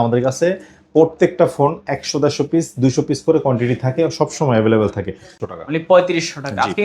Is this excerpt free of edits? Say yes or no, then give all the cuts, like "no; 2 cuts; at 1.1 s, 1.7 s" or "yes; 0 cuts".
no; 1 cut; at 5.4 s